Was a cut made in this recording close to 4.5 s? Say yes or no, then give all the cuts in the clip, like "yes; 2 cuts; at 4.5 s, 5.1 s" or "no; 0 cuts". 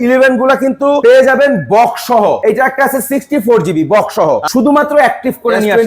yes; 3 cuts; at 1.0 s, 2.4 s, 4.5 s